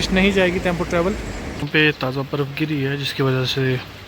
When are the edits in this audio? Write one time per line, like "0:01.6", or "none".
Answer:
0:01.4